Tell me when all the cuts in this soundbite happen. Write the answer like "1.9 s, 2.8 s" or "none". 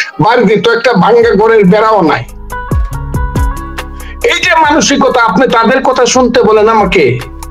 2.9 s, 4.2 s